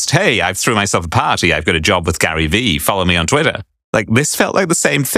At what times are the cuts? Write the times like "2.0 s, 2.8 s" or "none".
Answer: none

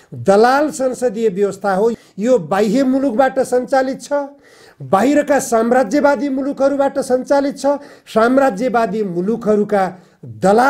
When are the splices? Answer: 1.9 s

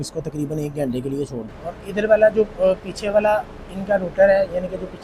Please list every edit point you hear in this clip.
1.4 s

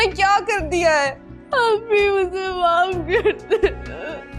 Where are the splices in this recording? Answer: none

